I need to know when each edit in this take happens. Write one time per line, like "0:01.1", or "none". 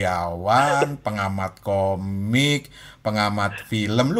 none